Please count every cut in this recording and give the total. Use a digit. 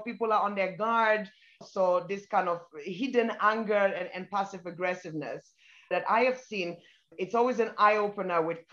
2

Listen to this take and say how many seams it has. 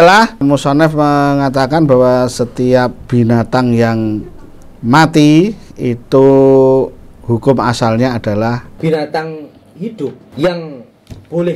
1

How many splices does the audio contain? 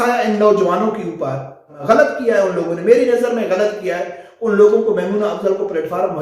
1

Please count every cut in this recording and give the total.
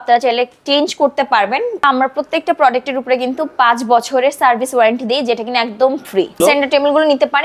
2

